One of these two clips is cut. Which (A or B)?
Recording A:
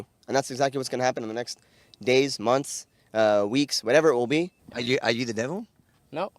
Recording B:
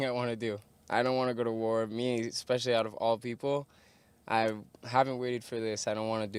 A